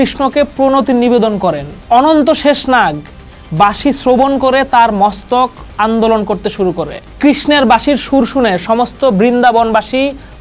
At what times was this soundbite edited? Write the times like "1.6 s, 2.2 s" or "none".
none